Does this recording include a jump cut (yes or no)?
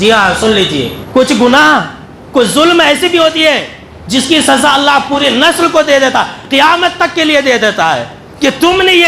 yes